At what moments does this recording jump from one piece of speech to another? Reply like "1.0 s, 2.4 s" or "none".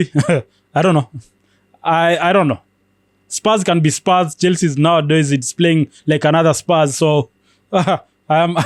none